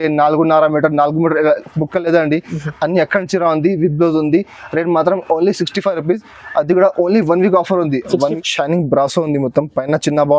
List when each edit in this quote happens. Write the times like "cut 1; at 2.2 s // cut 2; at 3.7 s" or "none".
cut 1; at 8.3 s